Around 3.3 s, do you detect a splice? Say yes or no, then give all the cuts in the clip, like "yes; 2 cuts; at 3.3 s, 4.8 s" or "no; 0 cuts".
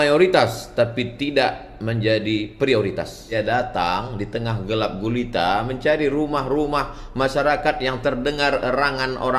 yes; 1 cut; at 3.3 s